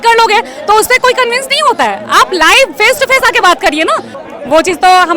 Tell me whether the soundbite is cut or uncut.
cut